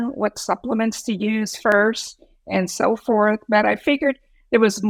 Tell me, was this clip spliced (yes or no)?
no